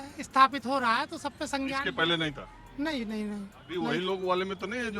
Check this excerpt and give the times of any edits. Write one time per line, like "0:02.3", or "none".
0:03.7